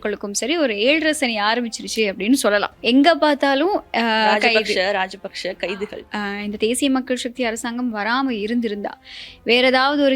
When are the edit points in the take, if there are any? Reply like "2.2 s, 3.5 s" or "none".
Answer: 6.1 s